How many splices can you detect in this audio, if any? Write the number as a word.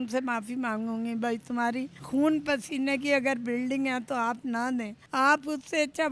two